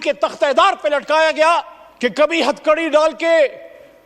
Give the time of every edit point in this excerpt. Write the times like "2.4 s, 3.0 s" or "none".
1.8 s

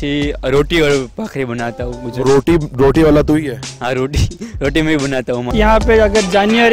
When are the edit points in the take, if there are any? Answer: 5.5 s

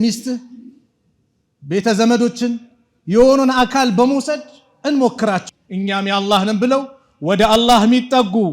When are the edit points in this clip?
5.5 s

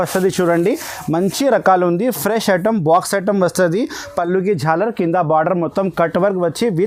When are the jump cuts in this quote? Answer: none

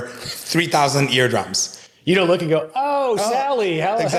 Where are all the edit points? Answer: none

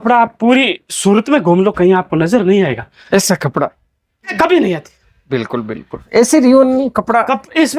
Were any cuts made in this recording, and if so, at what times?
4.3 s

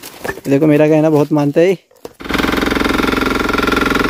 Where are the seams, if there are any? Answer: 2.3 s

